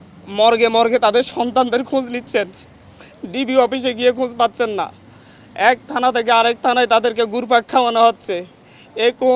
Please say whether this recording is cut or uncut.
uncut